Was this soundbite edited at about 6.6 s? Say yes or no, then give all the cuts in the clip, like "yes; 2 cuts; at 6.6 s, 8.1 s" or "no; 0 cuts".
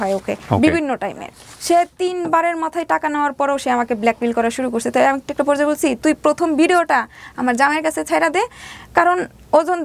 no; 1 cut; at 1.5 s